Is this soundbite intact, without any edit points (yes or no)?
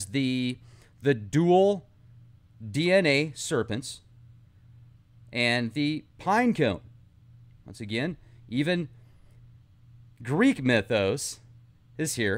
no